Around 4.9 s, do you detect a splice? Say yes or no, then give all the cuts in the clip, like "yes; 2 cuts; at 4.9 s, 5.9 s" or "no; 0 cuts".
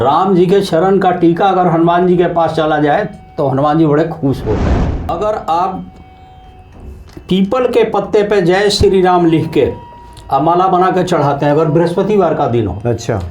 yes; 1 cut; at 4.9 s